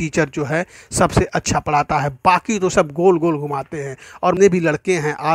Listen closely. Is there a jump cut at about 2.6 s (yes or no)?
no